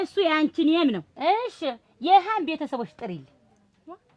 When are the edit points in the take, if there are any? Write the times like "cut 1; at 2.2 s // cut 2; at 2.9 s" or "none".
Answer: cut 1; at 1.1 s